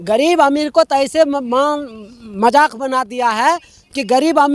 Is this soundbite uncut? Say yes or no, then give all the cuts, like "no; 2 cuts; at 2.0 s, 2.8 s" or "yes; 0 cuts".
yes; 0 cuts